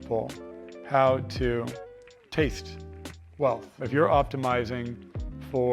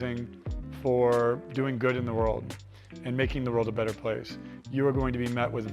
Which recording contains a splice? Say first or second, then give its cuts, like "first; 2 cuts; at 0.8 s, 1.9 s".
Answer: first; 1 cut; at 3.8 s